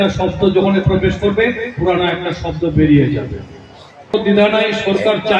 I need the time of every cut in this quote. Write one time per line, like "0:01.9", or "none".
0:04.1